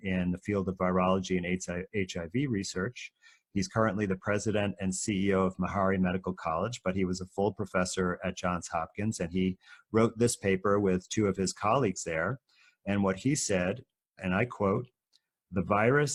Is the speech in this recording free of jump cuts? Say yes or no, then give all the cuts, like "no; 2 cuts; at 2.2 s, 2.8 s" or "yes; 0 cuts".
yes; 0 cuts